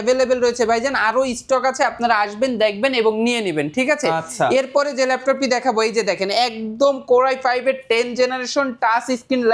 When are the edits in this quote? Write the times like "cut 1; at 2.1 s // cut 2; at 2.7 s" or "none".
none